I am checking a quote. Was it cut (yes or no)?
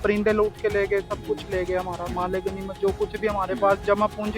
no